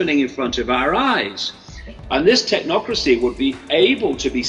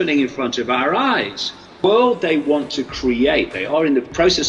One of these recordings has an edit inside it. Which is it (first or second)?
second